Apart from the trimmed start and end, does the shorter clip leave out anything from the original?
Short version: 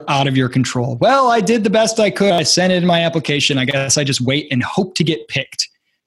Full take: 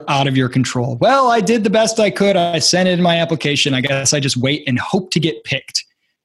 yes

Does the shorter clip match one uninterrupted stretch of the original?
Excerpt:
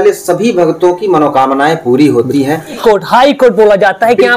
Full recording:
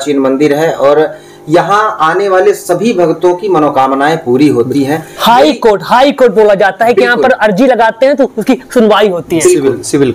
no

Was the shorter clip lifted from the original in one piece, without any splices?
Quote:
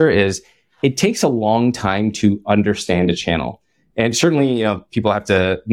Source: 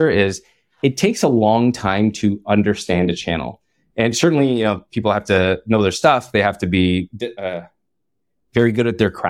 yes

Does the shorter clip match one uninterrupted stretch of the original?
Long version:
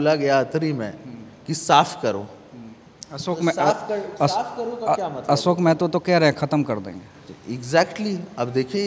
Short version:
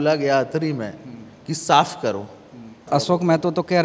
no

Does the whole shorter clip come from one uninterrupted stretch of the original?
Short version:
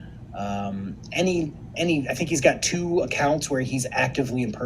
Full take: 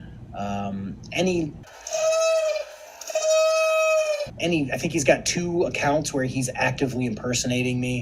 no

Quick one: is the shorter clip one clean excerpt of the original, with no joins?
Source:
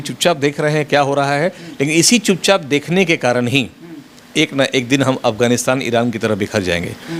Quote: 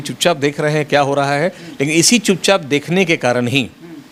yes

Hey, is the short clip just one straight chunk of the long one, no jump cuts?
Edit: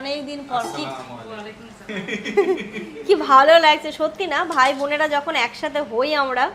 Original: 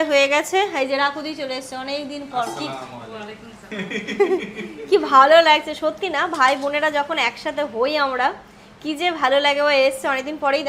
yes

